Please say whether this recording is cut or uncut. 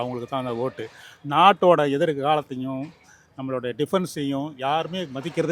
uncut